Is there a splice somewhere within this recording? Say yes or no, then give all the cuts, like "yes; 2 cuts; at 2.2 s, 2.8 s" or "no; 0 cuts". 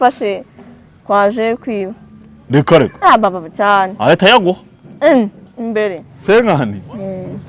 yes; 1 cut; at 6.1 s